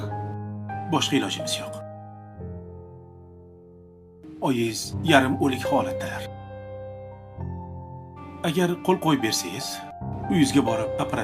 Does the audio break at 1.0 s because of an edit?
yes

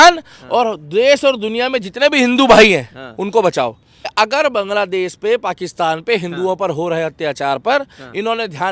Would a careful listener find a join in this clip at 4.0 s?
yes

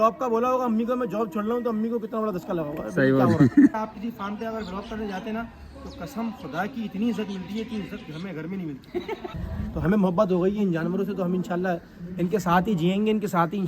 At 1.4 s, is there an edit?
no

